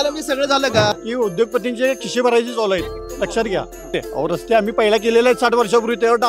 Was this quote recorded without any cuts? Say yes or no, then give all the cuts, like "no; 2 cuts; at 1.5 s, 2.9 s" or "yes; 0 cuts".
no; 2 cuts; at 1.0 s, 3.9 s